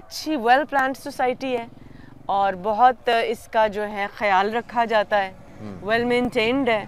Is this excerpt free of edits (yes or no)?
yes